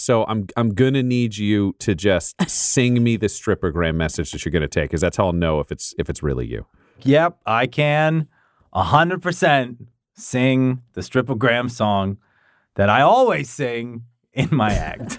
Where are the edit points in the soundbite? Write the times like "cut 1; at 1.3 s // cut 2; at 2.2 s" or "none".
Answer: cut 1; at 7.0 s